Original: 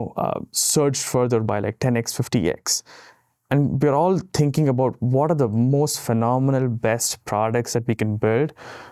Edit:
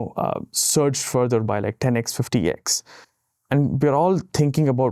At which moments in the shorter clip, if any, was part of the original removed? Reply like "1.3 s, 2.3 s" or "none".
none